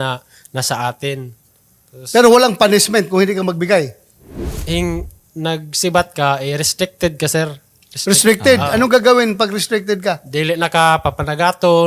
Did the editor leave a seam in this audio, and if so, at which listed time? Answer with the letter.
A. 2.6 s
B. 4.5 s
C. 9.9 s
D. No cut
B